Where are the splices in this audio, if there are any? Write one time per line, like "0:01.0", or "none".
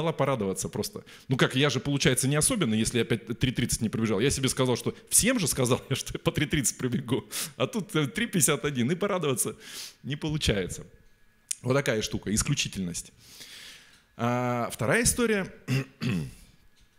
none

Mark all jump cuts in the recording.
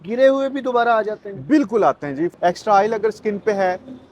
0:02.3

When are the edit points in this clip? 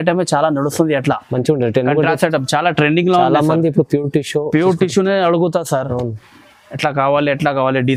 none

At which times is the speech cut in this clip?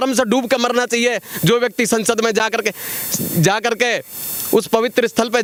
none

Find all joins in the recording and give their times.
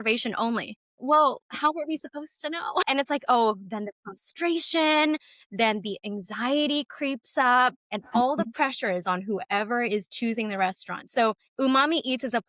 none

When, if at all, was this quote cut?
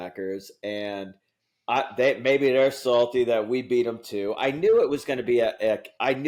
none

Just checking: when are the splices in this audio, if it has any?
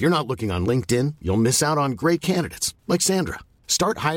none

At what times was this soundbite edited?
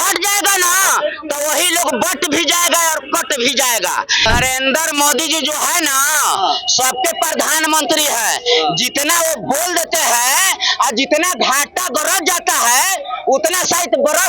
0:04.3

